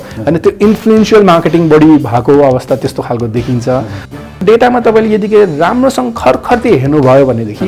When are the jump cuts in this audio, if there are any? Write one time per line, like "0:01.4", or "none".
0:04.0